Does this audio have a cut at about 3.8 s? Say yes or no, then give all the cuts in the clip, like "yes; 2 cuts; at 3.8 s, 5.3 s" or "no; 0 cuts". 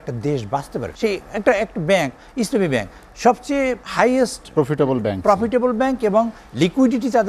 yes; 2 cuts; at 0.9 s, 3.8 s